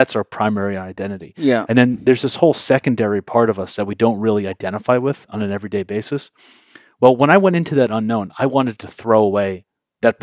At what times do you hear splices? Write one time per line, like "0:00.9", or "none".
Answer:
none